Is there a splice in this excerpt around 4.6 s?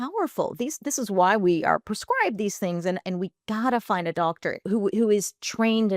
yes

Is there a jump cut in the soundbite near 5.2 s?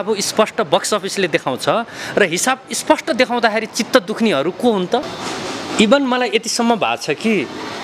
yes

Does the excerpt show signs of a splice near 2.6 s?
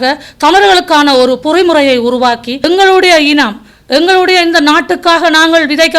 yes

